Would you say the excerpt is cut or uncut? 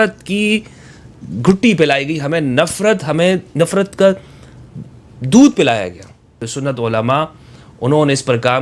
cut